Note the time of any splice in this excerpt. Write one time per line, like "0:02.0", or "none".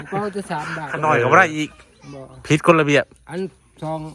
0:00.9